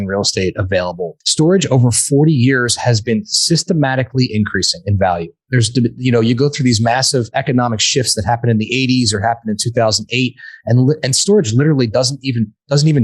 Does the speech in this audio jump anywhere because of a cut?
yes; 1 cut; at 1.1 s

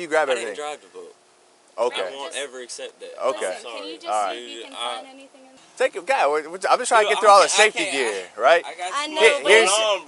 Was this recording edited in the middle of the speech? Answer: no; 0 cuts

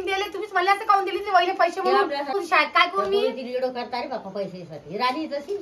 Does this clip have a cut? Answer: yes; 1 cut; at 2.3 s

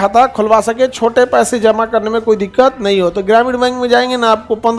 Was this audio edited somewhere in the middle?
no; 0 cuts

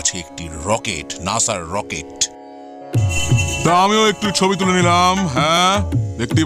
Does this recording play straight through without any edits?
yes; 0 cuts

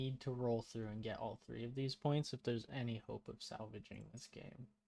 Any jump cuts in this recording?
no; 0 cuts

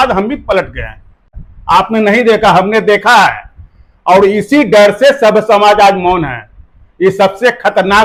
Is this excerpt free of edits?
yes; 0 cuts

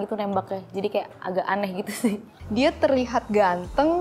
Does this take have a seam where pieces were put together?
yes; 1 cut; at 2.4 s

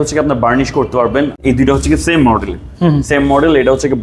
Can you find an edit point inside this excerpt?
yes; 1 cut; at 1.4 s

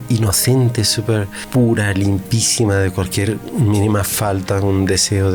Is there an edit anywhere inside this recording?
yes; 1 cut; at 1.4 s

